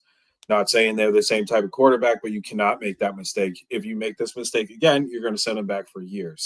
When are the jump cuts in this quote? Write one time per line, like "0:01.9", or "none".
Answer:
none